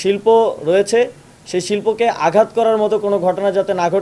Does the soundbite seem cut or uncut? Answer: uncut